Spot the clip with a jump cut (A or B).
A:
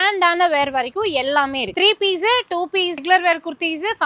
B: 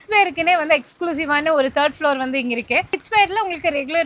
A